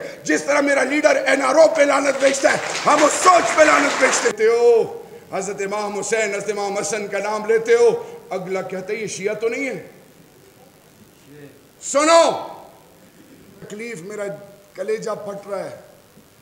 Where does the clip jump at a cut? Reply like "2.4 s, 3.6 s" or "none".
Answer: 4.3 s, 13.7 s